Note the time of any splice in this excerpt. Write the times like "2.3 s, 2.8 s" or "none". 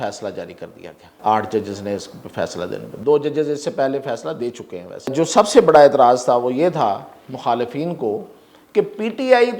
1.0 s, 5.1 s